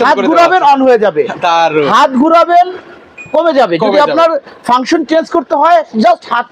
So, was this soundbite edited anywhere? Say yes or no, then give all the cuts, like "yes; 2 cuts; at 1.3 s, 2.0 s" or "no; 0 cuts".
no; 0 cuts